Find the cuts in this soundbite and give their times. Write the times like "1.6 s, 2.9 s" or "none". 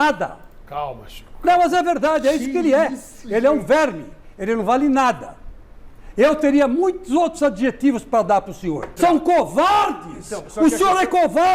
8.9 s